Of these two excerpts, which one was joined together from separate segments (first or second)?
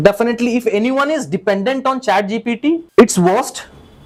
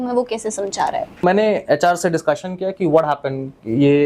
second